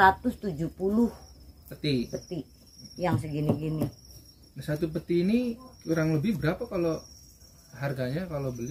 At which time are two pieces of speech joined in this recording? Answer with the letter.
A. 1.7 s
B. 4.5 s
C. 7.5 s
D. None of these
D